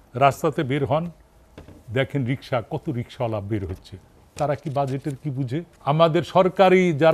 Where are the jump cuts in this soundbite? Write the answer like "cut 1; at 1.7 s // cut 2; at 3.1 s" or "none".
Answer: cut 1; at 5.7 s